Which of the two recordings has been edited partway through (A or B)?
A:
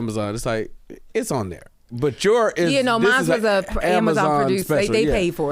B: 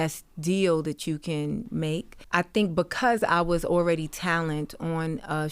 B